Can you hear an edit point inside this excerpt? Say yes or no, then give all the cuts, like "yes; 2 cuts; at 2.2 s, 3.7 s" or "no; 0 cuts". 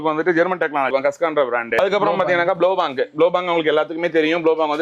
no; 0 cuts